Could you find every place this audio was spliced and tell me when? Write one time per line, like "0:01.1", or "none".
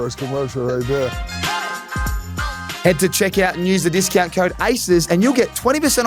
none